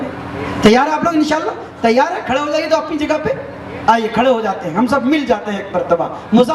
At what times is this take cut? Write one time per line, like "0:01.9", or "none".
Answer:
none